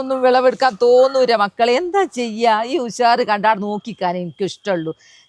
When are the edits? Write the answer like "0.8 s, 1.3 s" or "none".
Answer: none